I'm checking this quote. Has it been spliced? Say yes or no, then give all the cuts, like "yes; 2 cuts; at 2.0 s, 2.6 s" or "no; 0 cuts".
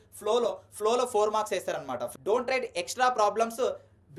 yes; 1 cut; at 2.1 s